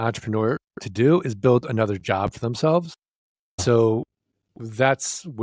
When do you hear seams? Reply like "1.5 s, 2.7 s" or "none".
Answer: 3.6 s